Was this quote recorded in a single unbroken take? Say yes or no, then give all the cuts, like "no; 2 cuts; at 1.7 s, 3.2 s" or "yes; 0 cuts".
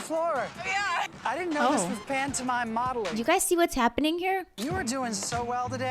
no; 2 cuts; at 3.1 s, 4.5 s